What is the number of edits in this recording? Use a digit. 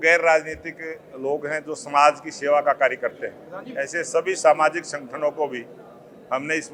0